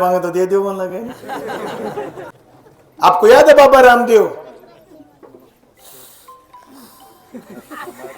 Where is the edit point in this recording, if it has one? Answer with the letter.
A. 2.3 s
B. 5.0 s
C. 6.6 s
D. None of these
A